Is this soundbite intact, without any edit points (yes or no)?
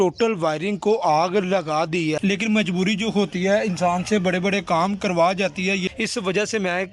no